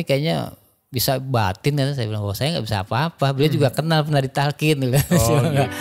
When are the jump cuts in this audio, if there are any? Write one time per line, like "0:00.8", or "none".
none